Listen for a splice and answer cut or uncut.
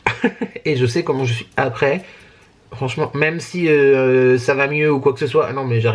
uncut